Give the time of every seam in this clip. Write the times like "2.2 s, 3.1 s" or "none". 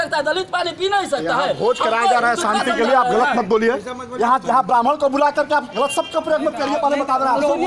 none